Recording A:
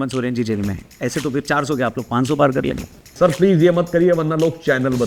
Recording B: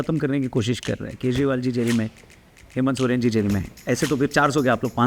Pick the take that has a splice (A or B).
A